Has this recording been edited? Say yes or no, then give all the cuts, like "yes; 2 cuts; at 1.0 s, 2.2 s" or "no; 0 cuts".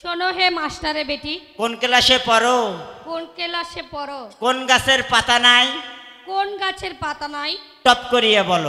no; 0 cuts